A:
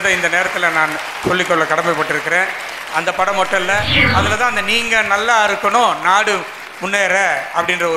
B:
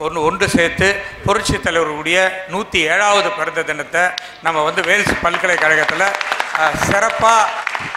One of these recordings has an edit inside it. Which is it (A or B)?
A